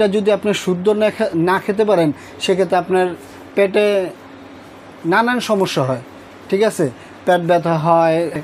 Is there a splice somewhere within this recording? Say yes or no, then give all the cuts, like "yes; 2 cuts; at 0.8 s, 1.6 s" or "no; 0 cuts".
no; 0 cuts